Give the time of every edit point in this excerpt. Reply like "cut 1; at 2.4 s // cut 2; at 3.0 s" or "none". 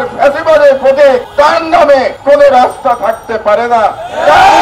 cut 1; at 1.3 s // cut 2; at 2.1 s